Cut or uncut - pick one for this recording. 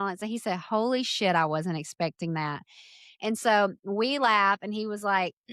uncut